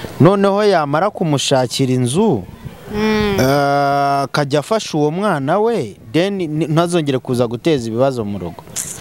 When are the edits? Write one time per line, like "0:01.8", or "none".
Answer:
none